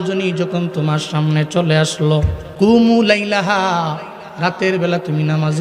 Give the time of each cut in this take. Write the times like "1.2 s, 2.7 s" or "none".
2.4 s